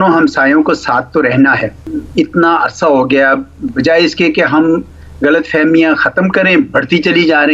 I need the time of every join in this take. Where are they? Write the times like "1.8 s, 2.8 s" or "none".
1.9 s